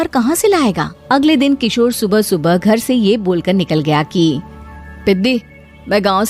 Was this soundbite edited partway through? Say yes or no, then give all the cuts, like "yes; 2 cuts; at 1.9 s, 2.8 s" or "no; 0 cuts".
yes; 1 cut; at 0.9 s